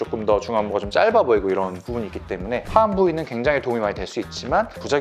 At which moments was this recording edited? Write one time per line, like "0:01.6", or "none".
0:02.6